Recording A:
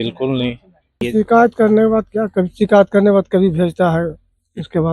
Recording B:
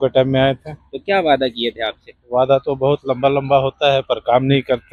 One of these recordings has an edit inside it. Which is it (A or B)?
A